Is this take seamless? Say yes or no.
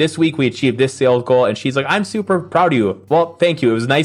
yes